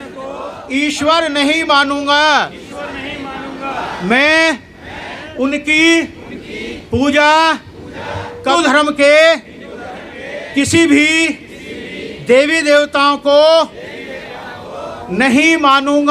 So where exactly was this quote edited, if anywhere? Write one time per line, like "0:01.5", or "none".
0:08.5